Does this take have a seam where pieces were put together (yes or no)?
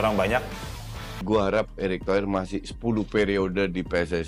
yes